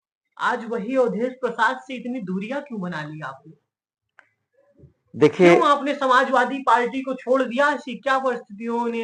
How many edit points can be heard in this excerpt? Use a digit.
0